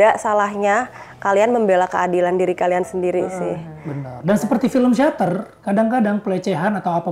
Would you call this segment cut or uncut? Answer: uncut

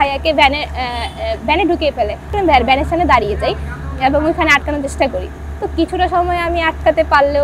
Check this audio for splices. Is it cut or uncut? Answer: cut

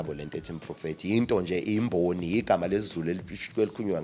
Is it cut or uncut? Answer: uncut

